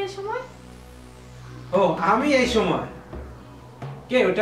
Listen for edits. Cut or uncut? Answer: uncut